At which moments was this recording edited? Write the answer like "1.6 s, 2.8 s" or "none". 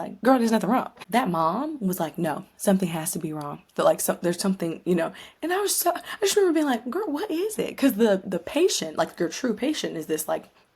1.0 s